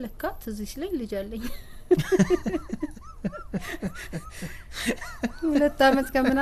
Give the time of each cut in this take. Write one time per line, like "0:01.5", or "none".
none

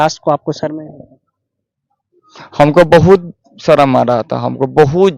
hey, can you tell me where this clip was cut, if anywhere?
none

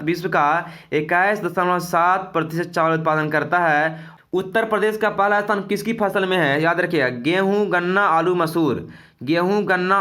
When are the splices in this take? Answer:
0:04.0

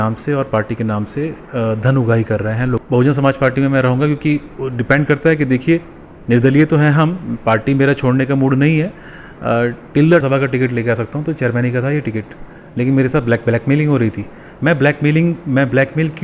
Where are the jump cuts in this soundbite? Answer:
0:02.8
0:10.2

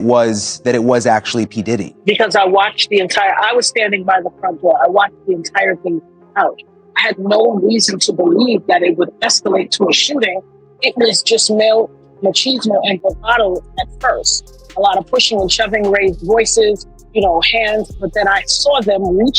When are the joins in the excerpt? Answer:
0:01.9

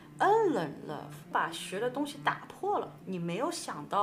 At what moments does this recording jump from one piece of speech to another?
0:01.3
0:03.0

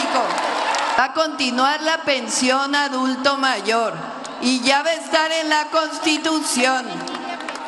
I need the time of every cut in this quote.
0:01.0

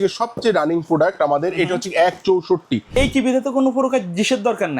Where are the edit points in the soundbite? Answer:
0:02.9

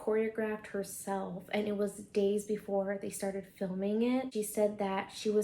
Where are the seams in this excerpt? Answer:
0:04.3

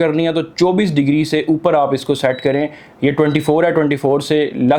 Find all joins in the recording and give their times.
none

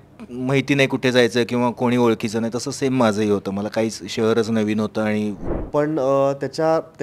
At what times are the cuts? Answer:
0:05.4

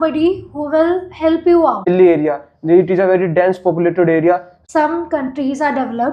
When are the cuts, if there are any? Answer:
0:01.9
0:04.5

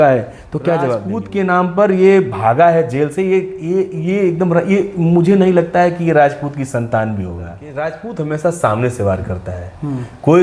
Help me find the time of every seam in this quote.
0:01.1
0:07.6

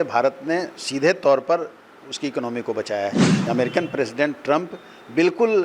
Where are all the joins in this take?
0:03.4

